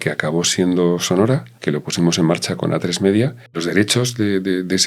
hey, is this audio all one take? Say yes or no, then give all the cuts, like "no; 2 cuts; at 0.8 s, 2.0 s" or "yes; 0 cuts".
no; 2 cuts; at 1.5 s, 3.5 s